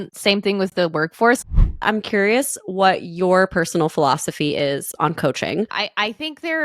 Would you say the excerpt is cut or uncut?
cut